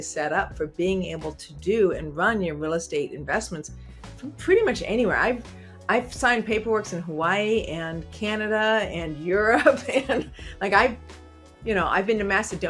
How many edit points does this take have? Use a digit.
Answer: 0